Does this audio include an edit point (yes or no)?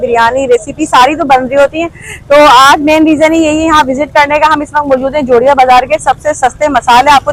no